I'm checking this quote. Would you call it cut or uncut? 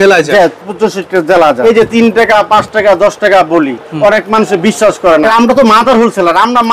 cut